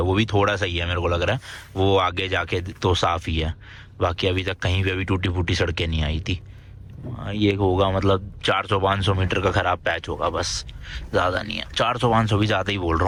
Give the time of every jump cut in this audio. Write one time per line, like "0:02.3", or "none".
none